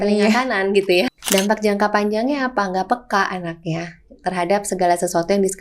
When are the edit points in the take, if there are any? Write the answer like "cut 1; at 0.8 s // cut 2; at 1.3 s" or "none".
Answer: cut 1; at 1.1 s